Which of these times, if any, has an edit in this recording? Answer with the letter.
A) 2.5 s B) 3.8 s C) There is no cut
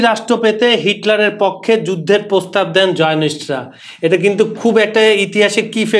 C